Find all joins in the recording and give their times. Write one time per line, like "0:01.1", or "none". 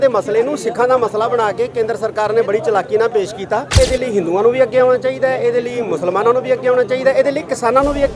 0:03.8